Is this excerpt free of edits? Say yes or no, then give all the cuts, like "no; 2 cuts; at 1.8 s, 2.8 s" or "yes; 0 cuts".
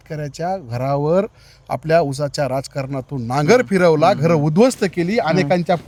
yes; 0 cuts